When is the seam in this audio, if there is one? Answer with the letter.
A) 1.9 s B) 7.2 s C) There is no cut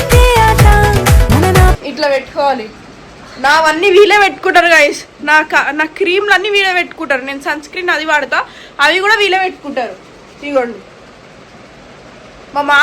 A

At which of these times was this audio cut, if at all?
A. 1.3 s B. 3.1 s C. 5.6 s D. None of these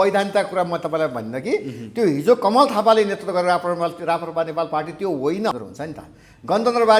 C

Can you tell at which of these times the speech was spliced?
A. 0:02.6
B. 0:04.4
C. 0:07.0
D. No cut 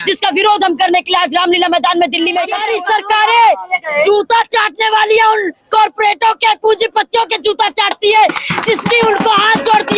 A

